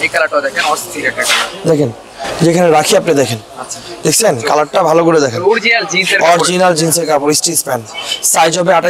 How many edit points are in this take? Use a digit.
0